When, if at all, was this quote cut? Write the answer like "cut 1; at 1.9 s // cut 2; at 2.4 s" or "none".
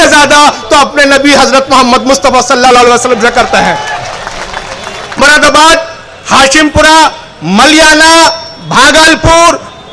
cut 1; at 5.2 s